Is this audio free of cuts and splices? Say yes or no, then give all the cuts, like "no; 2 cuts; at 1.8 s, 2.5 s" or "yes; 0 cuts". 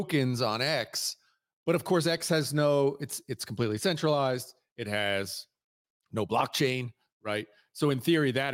yes; 0 cuts